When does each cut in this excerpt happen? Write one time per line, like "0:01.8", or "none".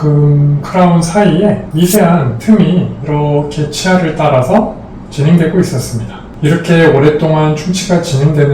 0:06.2